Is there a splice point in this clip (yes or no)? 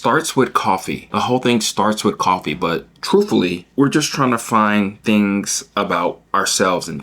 yes